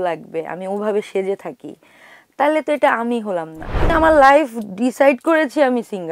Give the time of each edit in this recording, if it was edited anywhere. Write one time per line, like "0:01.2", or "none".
0:03.9